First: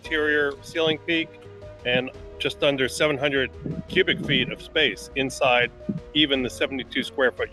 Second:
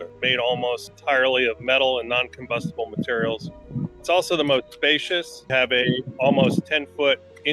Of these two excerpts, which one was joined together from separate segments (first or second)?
second